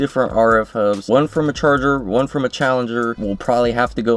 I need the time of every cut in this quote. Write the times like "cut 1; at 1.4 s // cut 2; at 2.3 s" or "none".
cut 1; at 1.0 s // cut 2; at 3.2 s